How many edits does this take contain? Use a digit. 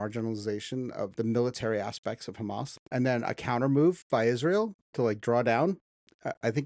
2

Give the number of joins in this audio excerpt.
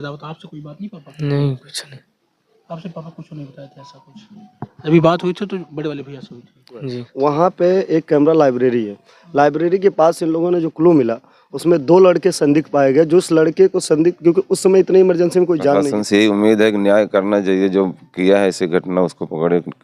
2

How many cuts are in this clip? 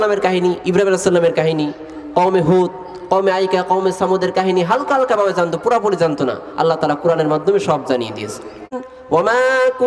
1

